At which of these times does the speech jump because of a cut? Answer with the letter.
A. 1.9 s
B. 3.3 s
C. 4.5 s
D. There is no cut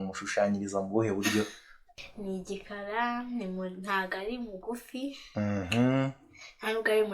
A